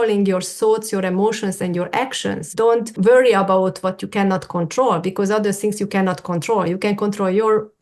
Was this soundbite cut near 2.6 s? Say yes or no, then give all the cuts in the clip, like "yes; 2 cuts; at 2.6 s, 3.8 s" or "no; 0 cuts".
yes; 1 cut; at 2.6 s